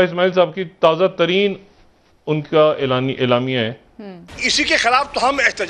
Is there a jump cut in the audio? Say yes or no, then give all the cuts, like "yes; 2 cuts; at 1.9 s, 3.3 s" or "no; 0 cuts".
yes; 1 cut; at 4.2 s